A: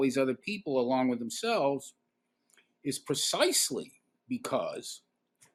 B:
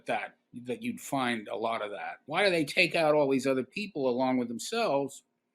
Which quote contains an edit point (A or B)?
B